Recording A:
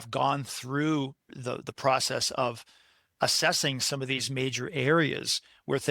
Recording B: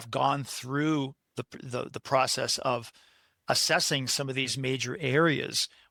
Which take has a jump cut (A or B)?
A